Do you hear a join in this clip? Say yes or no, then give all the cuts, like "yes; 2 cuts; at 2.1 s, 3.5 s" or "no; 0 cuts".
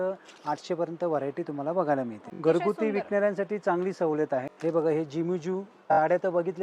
yes; 3 cuts; at 2.2 s, 4.5 s, 5.8 s